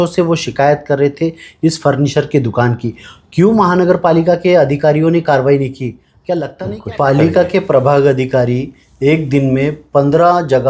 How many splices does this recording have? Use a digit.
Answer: 1